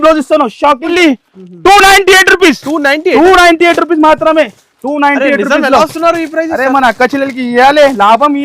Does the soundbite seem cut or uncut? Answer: cut